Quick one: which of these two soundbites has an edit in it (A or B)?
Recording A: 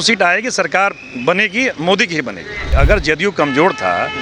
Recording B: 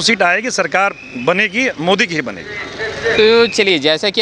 A